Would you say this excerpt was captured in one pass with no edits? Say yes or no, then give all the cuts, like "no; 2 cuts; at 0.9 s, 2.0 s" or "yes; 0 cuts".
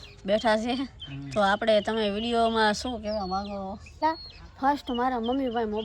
no; 1 cut; at 4.0 s